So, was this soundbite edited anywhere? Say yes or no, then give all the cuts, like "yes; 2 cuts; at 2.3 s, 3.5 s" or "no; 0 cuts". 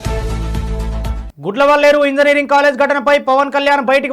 yes; 1 cut; at 1.2 s